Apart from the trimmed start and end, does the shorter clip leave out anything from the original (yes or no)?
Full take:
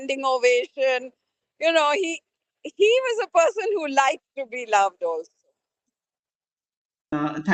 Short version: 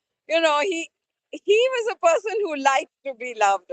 no